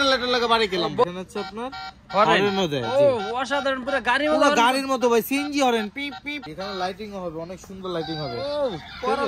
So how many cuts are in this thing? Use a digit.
2